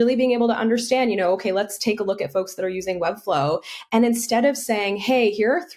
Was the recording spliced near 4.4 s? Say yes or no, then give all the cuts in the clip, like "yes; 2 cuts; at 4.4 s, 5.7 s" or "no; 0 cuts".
no; 0 cuts